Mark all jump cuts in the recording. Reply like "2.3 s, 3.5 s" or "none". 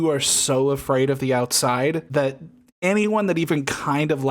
2.0 s